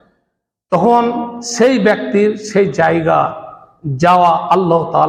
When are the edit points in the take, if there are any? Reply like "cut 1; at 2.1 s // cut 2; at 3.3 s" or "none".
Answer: none